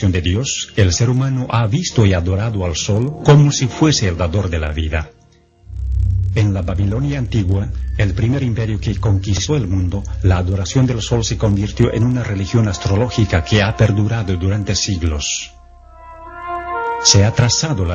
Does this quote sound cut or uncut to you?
uncut